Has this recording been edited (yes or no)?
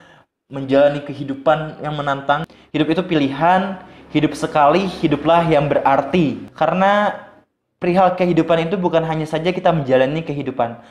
yes